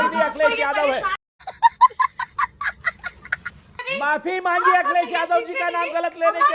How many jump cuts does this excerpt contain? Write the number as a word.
one